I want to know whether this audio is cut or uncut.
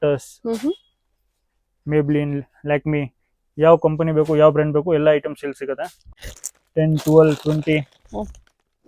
cut